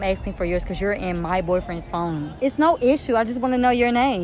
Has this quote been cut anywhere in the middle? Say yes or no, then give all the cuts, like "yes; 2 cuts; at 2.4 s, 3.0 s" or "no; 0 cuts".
no; 0 cuts